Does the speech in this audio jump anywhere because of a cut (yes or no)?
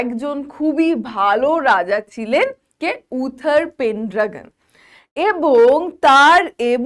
no